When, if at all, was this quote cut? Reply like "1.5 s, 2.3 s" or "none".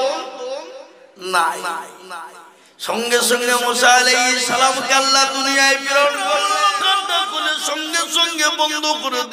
6.4 s